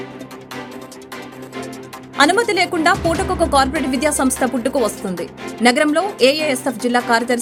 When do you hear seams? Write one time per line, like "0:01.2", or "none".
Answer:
none